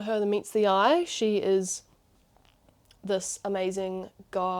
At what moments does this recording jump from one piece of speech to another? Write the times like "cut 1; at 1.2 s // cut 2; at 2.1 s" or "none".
none